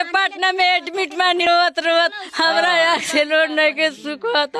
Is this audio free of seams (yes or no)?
no